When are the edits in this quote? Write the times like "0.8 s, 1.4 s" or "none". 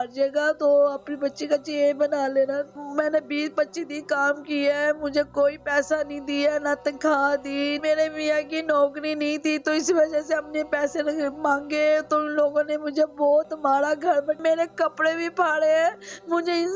2.7 s, 7.8 s, 14.4 s

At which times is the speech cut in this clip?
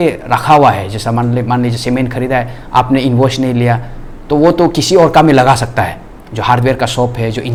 none

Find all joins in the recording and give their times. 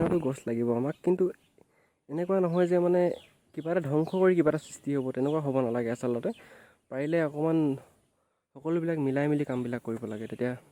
none

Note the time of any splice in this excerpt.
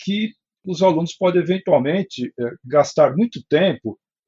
none

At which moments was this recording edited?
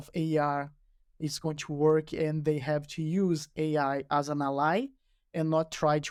none

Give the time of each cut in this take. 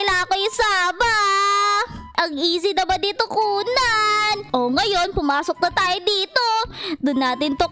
2.1 s

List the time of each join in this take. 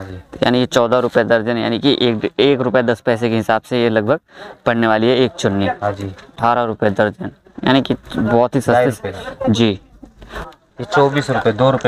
6.3 s, 10.4 s

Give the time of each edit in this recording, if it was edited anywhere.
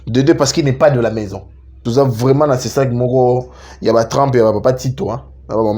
1.8 s

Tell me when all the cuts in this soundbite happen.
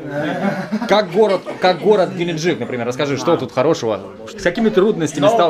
4.2 s

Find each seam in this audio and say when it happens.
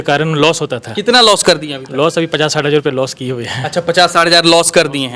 none

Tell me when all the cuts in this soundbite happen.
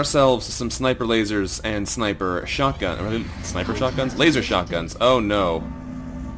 4.2 s

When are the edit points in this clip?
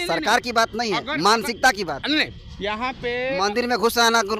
none

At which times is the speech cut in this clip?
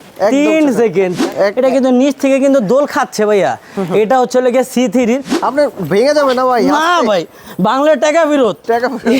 1.2 s, 5.3 s

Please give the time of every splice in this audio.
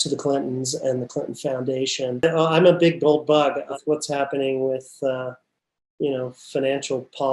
2.2 s, 3.8 s

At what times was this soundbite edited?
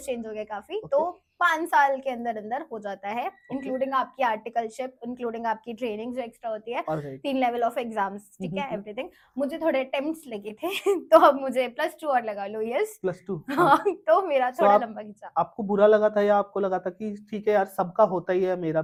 none

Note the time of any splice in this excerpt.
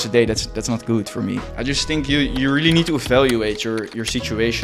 1.4 s

